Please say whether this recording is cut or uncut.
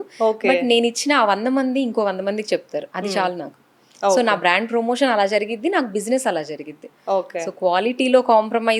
uncut